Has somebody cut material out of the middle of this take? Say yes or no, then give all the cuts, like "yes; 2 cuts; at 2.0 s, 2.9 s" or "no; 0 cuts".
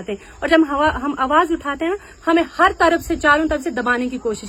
no; 0 cuts